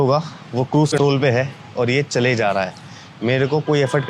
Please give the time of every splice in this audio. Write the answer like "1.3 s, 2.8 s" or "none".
0.9 s